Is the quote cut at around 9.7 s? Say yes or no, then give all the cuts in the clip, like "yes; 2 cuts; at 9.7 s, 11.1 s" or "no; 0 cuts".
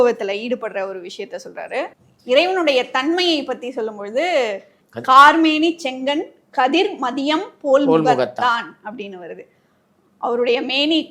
no; 1 cut; at 2.1 s